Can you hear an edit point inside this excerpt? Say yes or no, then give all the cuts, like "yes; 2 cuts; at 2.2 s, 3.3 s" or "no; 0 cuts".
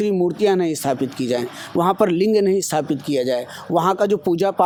no; 0 cuts